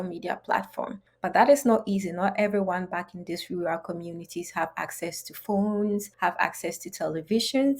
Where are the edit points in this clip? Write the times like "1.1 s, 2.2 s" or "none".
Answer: 1.0 s, 6.1 s